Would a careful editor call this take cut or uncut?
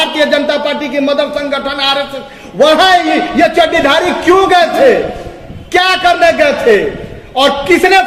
uncut